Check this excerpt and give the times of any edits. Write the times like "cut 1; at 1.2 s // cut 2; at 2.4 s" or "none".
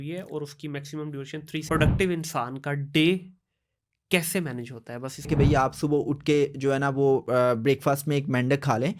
cut 1; at 1.6 s // cut 2; at 5.3 s